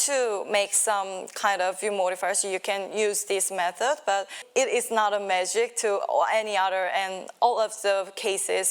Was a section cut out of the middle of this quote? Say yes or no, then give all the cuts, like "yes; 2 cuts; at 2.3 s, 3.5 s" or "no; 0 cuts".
yes; 1 cut; at 4.4 s